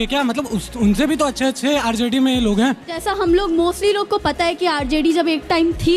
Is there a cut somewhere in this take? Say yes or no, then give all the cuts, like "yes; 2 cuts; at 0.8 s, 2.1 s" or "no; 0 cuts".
yes; 1 cut; at 3.0 s